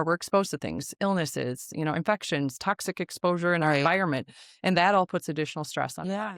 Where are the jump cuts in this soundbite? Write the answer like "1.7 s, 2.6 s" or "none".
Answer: none